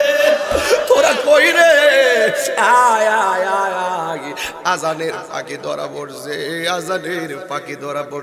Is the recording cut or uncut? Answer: uncut